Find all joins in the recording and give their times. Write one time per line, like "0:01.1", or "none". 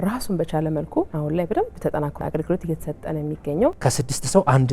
0:01.1
0:02.2
0:03.8